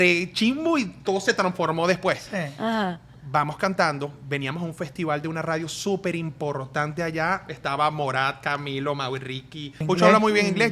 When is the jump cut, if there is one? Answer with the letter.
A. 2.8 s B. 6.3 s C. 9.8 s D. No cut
C